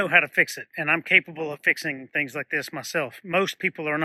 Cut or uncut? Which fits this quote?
uncut